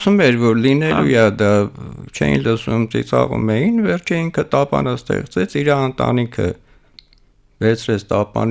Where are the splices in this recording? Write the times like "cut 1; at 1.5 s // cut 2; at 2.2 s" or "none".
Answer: none